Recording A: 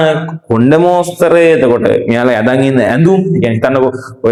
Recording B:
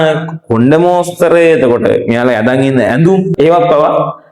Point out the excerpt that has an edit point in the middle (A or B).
B